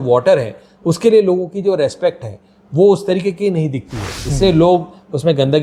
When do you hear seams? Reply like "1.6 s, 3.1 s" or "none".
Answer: none